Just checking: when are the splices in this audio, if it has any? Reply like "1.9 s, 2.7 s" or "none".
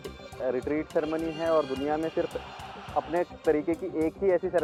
none